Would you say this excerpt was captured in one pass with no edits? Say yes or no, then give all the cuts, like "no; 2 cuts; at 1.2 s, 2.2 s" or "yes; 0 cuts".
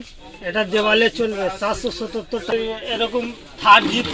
no; 1 cut; at 2.5 s